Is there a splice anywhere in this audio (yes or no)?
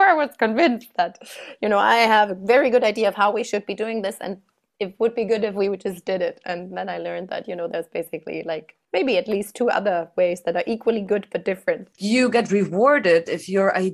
yes